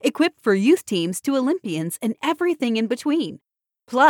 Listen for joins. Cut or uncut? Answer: uncut